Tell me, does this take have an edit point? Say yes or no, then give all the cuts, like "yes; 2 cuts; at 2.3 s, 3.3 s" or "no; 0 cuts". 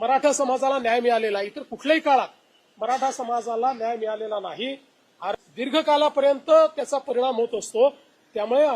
yes; 1 cut; at 5.3 s